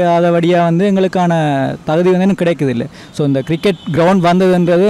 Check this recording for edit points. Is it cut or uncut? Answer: uncut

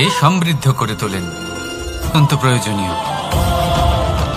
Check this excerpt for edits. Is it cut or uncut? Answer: cut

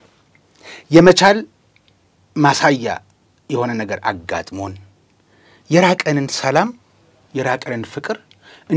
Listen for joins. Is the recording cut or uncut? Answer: uncut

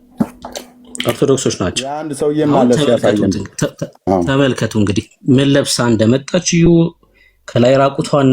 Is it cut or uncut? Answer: cut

